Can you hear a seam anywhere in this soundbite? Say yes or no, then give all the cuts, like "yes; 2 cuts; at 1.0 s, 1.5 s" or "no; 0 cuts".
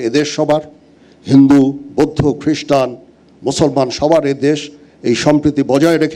no; 0 cuts